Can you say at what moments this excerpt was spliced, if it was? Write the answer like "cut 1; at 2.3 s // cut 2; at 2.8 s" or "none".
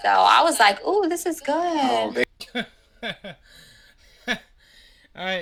none